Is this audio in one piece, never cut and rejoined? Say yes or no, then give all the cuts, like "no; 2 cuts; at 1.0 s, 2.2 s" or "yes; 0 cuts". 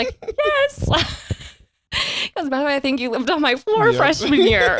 no; 1 cut; at 1.9 s